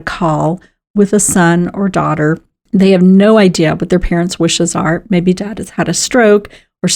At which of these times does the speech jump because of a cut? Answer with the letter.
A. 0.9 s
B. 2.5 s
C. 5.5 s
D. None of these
B